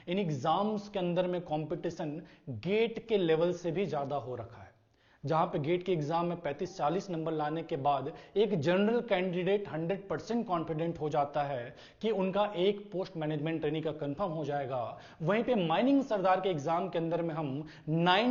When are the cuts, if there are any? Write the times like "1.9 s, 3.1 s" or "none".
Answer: none